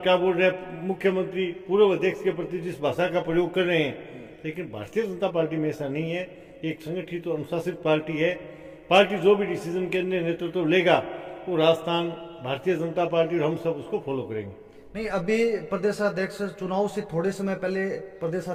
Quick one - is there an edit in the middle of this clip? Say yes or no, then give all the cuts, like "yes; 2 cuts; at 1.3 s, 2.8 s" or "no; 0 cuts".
no; 0 cuts